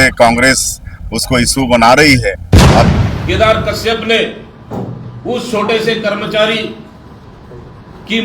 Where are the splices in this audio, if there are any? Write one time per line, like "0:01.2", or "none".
0:02.9